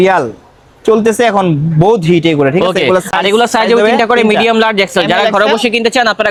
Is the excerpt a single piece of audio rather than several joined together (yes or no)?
yes